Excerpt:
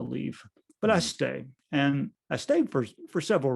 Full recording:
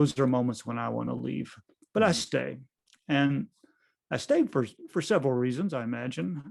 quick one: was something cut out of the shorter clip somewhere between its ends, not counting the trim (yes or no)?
yes